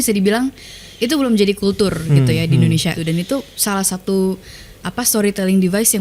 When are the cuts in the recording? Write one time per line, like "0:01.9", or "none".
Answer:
0:03.0